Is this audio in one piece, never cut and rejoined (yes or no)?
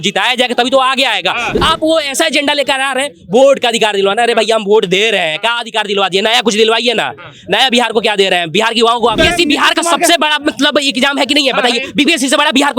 no